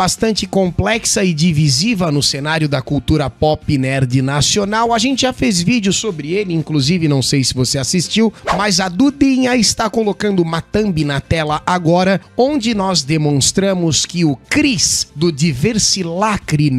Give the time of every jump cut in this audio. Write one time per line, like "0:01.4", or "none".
none